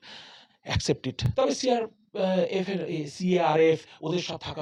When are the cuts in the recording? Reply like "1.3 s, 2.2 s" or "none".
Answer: none